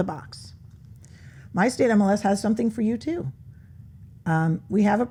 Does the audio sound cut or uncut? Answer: uncut